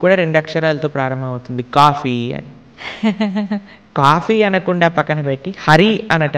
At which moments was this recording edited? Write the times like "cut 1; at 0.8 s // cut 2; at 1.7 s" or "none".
cut 1; at 3.9 s